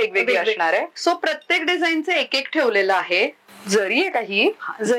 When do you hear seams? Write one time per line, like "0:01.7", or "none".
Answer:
0:03.4

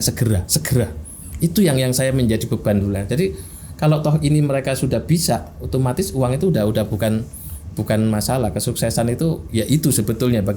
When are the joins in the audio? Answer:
none

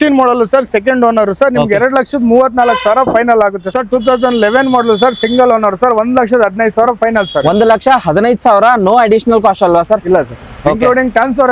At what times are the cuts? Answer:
0:03.7

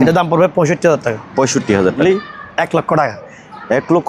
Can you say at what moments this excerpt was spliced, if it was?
0:02.0

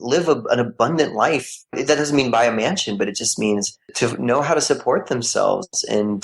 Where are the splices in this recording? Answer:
0:01.7
0:03.9

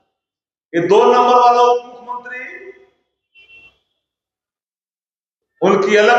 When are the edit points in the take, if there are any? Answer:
none

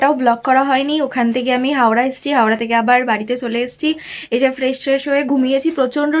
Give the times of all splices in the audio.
none

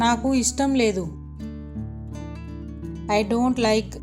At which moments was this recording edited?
0:01.2
0:03.1

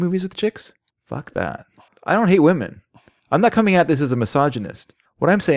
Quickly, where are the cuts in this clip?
0:01.9

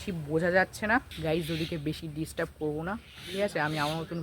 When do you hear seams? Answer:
0:01.1

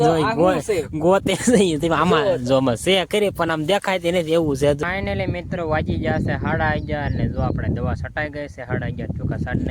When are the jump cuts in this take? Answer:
0:04.8

